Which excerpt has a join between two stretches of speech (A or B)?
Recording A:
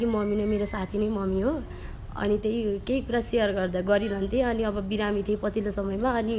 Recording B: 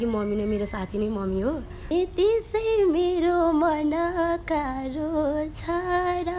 B